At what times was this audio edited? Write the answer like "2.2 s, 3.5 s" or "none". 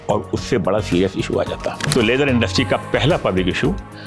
1.9 s